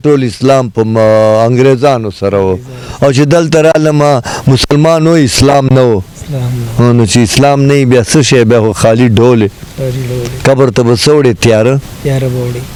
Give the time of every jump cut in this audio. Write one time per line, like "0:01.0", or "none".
none